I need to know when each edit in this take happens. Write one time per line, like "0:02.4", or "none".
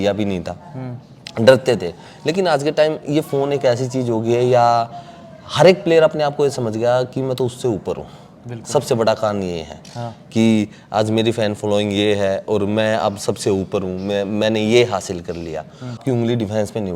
0:16.0